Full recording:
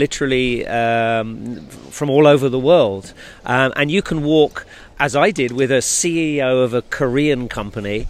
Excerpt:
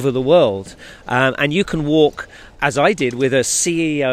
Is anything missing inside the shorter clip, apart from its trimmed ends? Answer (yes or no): no